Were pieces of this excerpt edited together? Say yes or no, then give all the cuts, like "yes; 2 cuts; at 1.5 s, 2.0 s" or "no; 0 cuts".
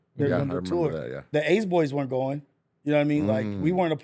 yes; 1 cut; at 1.2 s